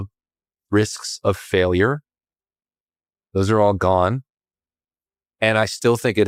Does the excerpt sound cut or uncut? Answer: uncut